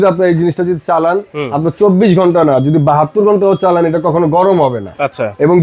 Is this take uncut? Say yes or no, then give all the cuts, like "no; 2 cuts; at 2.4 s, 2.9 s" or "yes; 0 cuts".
yes; 0 cuts